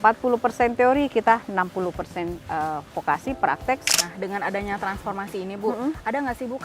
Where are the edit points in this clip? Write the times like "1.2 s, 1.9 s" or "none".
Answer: 3.8 s